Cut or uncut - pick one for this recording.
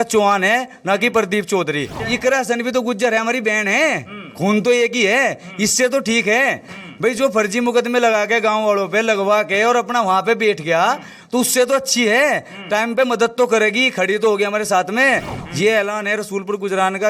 cut